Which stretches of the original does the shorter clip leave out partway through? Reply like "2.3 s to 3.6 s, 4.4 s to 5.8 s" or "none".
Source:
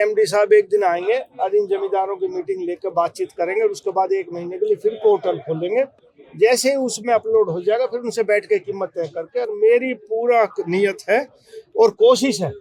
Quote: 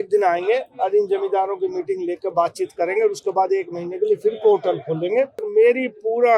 6.0 s to 9.5 s